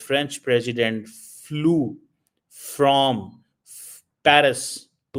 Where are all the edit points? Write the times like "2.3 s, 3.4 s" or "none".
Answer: none